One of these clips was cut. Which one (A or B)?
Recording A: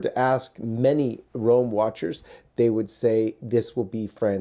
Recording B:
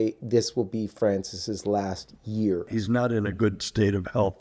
B